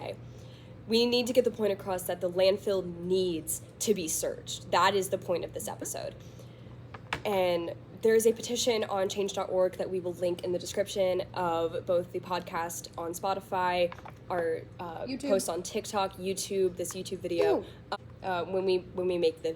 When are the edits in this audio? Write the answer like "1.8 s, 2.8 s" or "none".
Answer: 17.8 s